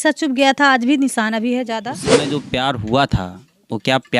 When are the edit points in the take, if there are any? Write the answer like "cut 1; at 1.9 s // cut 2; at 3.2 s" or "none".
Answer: cut 1; at 2.3 s